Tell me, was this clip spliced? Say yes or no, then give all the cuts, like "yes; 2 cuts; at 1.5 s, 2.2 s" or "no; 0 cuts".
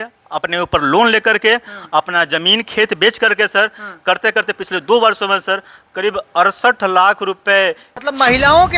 yes; 1 cut; at 7.9 s